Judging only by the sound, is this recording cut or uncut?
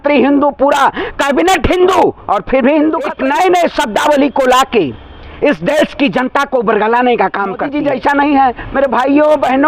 cut